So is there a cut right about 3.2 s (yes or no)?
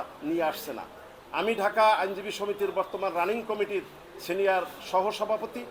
no